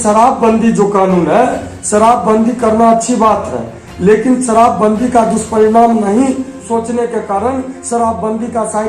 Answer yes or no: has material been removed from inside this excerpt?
yes